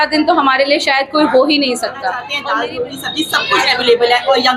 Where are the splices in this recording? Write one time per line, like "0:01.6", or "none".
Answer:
0:02.3